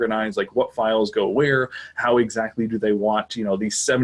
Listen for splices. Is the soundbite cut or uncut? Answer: uncut